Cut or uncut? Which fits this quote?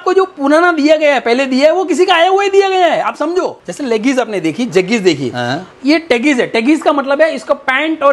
cut